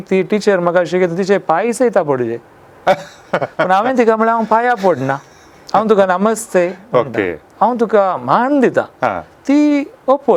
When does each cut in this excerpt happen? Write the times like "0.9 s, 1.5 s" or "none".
none